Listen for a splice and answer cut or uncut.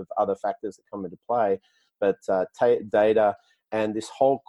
uncut